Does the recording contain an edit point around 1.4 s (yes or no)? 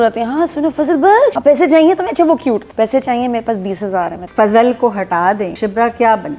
yes